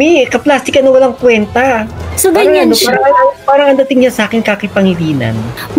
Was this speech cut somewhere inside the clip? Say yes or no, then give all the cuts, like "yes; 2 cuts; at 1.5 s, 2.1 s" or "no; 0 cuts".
yes; 1 cut; at 2.0 s